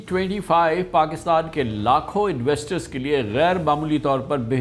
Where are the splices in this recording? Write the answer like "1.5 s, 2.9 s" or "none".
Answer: none